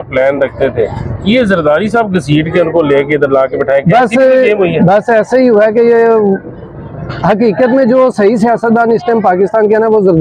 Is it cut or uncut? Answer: uncut